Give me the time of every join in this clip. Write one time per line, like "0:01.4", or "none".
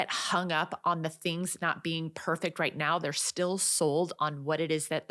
none

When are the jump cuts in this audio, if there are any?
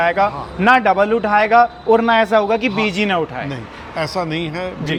none

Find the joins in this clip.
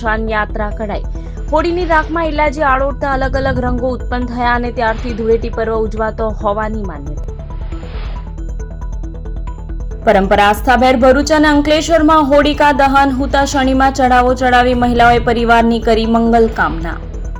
none

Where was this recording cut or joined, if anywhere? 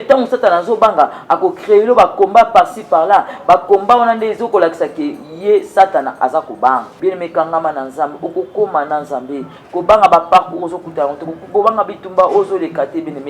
0:06.9

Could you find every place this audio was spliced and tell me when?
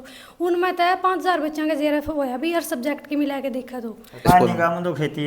0:04.1

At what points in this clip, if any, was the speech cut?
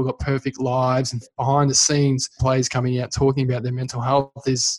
0:01.3
0:02.4

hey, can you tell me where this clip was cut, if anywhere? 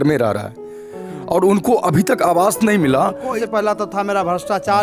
0:03.4

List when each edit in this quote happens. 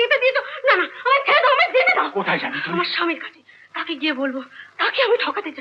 none

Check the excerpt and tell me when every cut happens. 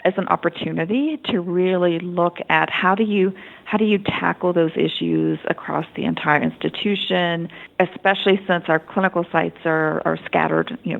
0:07.6

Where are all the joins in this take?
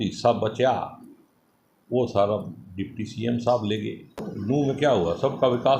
0:04.3

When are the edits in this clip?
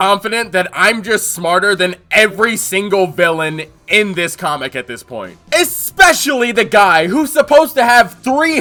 none

